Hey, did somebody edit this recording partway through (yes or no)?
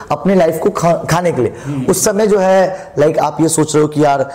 no